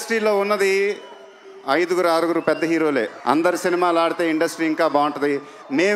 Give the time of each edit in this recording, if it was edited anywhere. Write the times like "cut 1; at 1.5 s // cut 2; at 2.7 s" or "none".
none